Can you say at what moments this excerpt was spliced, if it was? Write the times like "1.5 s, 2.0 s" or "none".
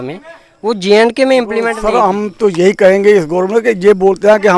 1.8 s